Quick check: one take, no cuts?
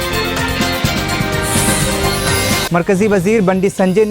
no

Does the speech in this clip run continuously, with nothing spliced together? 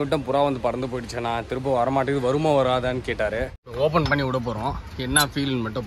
no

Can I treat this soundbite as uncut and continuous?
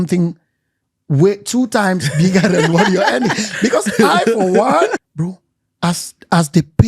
no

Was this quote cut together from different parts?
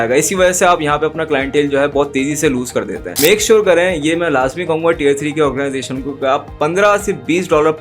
yes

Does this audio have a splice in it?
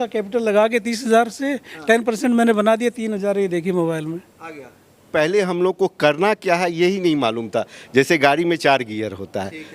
yes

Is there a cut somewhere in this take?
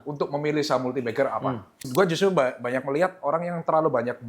yes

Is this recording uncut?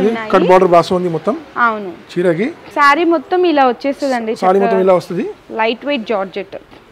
no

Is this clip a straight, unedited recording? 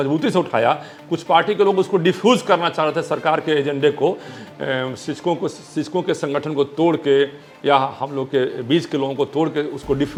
yes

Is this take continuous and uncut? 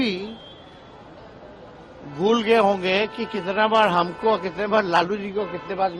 yes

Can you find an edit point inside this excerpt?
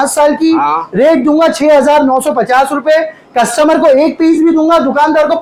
no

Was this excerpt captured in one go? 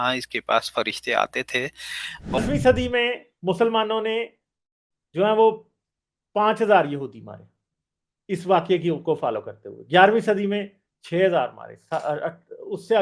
no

